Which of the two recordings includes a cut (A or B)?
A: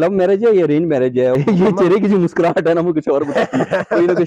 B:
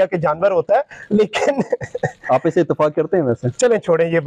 A